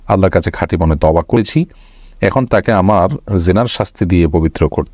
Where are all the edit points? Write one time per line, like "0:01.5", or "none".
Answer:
0:01.4